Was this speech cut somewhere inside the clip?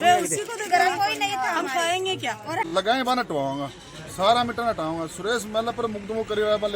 yes; 1 cut; at 2.6 s

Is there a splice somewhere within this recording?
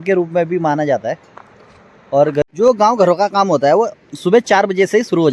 yes; 1 cut; at 2.4 s

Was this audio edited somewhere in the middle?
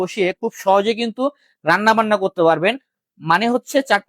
no; 0 cuts

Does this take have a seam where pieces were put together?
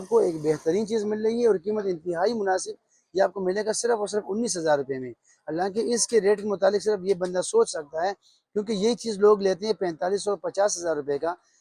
no; 0 cuts

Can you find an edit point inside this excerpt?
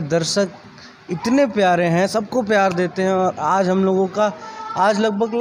no; 0 cuts

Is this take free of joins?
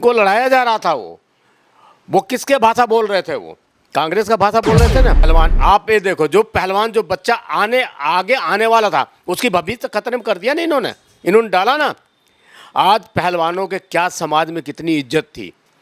no; 1 cut; at 5.3 s

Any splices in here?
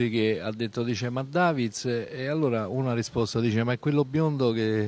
yes; 1 cut; at 1.7 s

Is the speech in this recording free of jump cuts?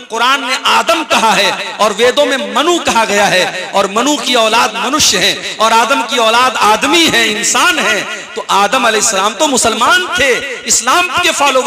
yes; 0 cuts

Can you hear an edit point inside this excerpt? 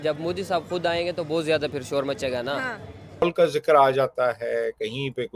yes; 1 cut; at 3.2 s

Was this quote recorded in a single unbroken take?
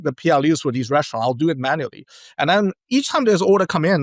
yes; 0 cuts

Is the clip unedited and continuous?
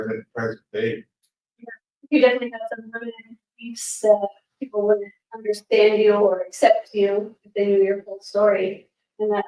yes; 0 cuts

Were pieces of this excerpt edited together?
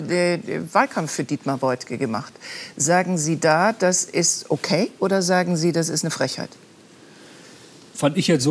no; 0 cuts

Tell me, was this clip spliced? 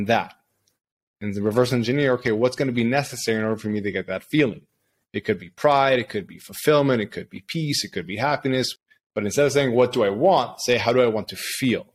yes; 1 cut; at 8.7 s

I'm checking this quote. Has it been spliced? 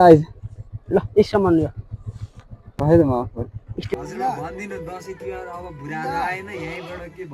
yes; 1 cut; at 3.9 s

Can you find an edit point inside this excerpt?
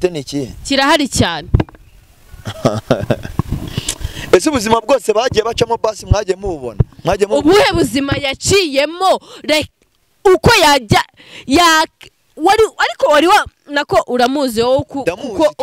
no; 0 cuts

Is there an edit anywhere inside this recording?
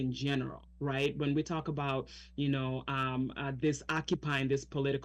no; 0 cuts

